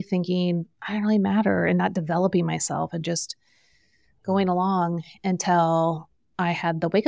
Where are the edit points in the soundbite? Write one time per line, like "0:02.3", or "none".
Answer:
none